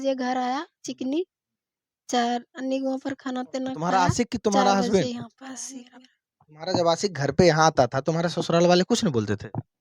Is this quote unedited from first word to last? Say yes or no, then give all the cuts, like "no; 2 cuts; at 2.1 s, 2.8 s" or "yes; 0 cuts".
no; 1 cut; at 3.8 s